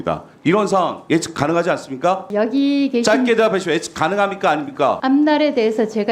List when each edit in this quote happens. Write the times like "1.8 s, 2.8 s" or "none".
2.2 s, 5.0 s